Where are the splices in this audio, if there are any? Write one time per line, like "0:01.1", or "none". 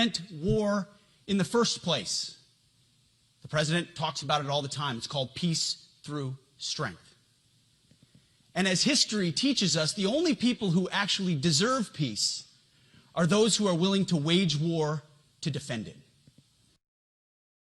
none

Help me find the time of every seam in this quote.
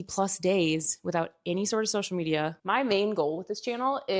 0:02.6

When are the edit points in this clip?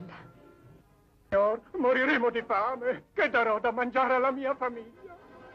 0:02.0

